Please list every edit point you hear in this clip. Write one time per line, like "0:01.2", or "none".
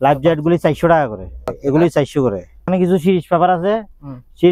0:01.6
0:02.7